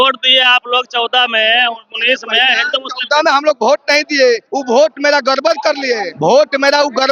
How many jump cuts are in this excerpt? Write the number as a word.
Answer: two